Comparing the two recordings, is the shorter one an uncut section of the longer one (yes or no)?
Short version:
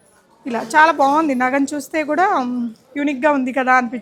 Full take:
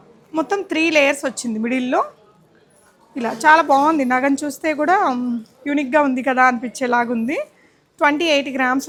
yes